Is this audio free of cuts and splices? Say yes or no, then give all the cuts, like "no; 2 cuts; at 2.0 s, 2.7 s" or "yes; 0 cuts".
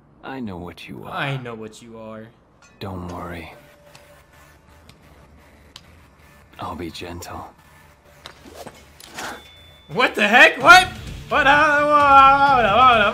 yes; 0 cuts